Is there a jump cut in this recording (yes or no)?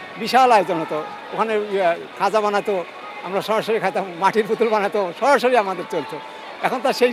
no